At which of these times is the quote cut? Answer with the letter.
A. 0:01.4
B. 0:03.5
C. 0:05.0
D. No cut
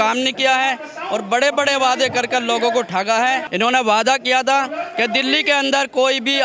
B